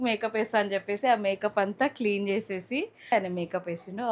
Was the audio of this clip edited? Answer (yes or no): yes